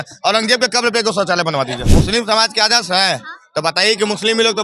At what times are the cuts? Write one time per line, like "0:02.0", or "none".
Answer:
0:01.8